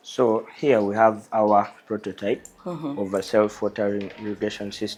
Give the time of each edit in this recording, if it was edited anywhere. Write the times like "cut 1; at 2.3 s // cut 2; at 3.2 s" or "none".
none